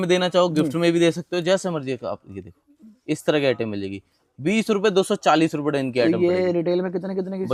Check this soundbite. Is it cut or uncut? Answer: uncut